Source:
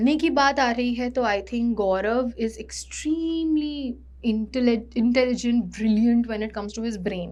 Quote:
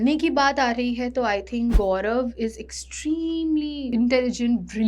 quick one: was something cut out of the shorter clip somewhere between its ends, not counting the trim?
yes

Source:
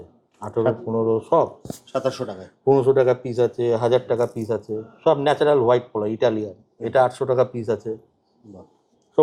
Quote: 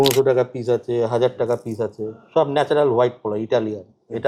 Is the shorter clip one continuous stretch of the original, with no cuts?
yes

